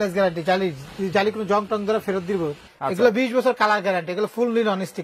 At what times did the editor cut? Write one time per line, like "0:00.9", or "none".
0:02.7